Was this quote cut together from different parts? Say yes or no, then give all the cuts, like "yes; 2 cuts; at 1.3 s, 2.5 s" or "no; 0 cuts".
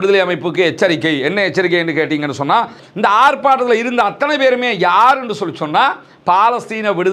yes; 1 cut; at 2.8 s